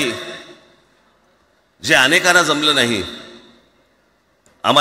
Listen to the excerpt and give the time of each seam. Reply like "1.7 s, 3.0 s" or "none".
none